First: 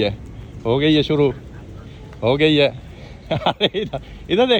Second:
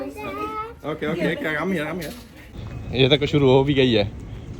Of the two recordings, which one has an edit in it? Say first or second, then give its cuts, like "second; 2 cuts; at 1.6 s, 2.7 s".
second; 1 cut; at 2.8 s